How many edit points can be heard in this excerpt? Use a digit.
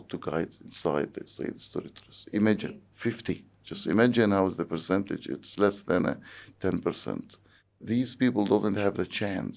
1